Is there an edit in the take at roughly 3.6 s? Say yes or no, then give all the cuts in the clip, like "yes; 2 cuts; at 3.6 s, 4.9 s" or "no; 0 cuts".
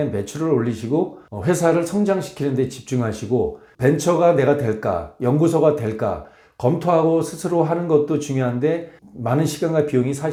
no; 0 cuts